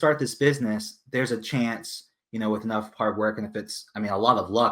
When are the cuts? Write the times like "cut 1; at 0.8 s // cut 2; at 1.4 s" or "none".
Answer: none